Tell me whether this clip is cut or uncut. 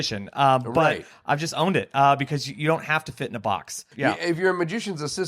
cut